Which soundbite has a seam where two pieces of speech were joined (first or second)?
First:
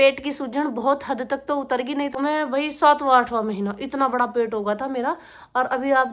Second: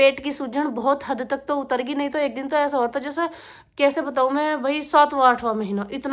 first